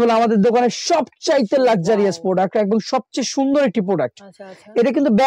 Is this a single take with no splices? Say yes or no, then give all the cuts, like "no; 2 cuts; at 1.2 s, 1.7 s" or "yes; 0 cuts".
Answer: yes; 0 cuts